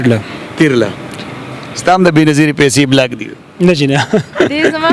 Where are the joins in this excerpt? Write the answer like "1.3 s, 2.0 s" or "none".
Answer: none

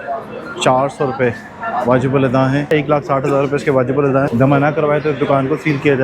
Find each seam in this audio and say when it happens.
2.7 s, 4.3 s

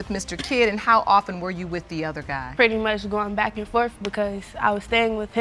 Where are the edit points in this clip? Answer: none

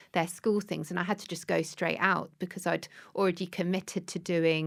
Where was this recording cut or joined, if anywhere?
none

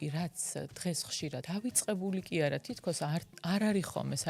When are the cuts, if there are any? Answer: 1.4 s

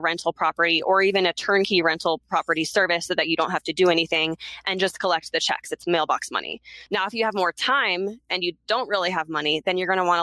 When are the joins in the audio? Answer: 6.7 s

